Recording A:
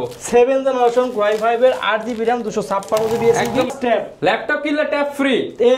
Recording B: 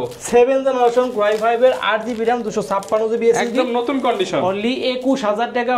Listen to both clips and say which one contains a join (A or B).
A